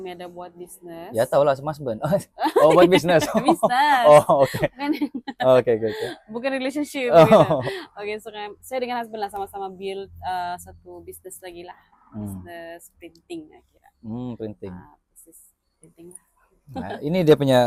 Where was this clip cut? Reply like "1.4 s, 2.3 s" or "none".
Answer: none